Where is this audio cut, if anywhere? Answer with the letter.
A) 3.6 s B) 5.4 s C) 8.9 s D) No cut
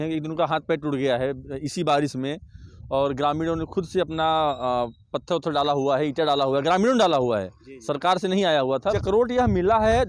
C